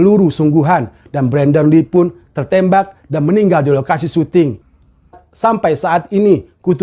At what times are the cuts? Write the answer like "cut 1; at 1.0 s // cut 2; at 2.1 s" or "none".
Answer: cut 1; at 4.7 s